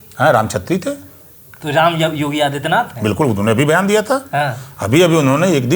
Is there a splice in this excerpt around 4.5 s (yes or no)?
no